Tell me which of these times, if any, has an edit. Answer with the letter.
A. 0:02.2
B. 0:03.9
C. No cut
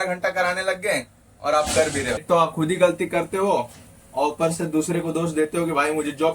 A